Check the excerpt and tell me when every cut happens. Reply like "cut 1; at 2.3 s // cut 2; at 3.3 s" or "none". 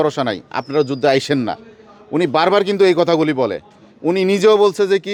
none